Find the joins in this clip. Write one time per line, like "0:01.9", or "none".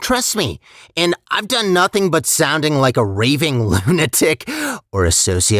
none